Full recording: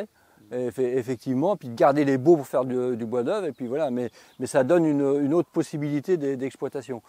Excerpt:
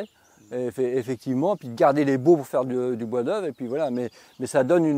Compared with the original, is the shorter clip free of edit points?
yes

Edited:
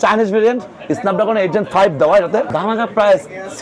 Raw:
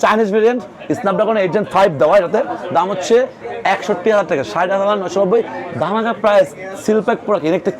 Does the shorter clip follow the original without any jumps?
no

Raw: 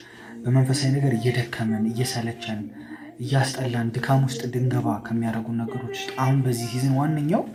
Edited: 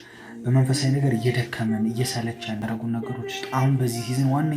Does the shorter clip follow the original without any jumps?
no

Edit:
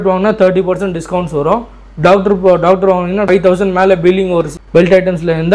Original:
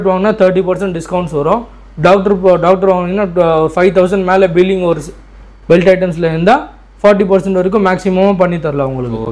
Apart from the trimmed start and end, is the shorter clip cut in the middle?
yes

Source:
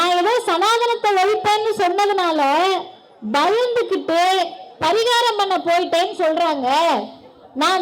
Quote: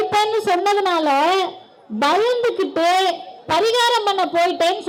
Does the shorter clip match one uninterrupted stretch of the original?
yes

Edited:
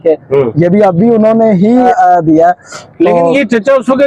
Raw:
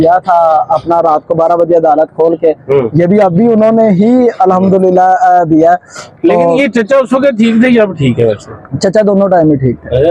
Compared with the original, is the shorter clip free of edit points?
no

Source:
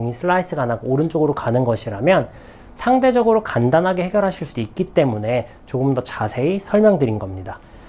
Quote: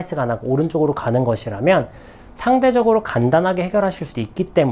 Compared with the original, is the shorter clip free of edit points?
yes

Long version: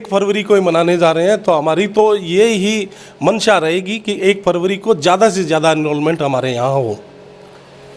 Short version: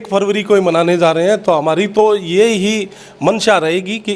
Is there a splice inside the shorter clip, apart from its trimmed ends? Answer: no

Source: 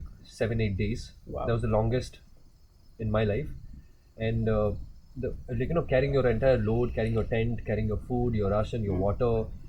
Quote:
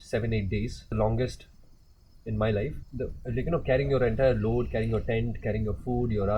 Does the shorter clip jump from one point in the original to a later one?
yes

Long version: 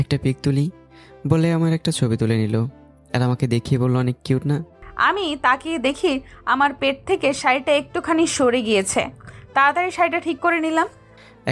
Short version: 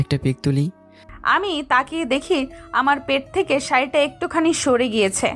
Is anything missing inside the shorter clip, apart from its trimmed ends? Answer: yes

